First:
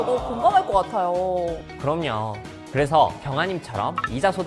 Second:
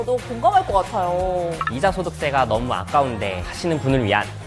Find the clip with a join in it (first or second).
second